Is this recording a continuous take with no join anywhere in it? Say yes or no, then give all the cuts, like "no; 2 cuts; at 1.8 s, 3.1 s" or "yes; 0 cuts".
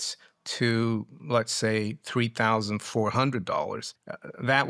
yes; 0 cuts